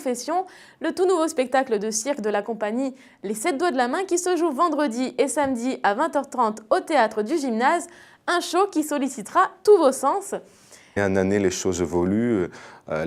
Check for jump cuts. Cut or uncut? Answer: uncut